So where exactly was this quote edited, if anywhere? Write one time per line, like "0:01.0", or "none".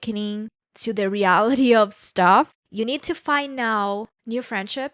0:02.6